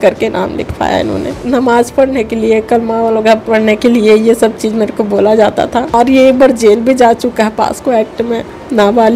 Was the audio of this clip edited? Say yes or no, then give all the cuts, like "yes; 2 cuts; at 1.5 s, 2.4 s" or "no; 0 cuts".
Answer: yes; 2 cuts; at 1.4 s, 5.9 s